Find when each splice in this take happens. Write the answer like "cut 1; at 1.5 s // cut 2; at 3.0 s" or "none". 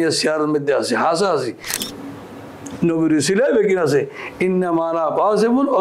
cut 1; at 1.7 s